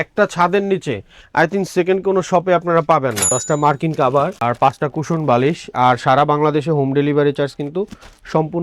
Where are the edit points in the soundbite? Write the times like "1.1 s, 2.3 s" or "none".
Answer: 3.3 s